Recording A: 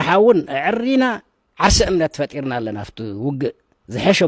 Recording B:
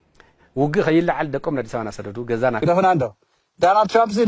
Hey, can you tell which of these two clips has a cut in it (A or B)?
B